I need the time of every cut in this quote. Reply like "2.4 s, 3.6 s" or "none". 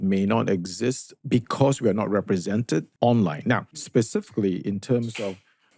1.1 s, 2.9 s, 3.7 s